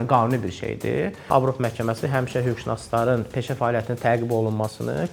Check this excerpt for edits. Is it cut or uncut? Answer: cut